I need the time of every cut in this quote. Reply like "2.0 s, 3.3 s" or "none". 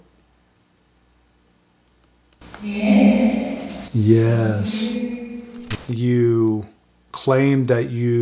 5.6 s